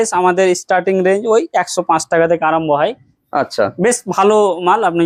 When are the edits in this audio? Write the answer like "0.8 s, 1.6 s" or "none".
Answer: none